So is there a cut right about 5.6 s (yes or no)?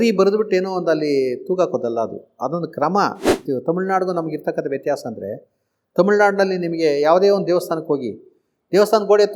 no